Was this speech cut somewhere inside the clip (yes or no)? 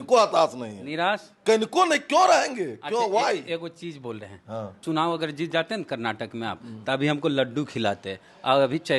yes